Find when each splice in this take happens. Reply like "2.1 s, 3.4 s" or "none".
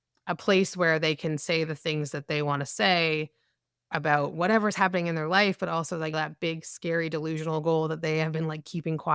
6.1 s